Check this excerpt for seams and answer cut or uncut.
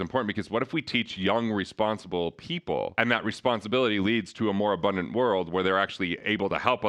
uncut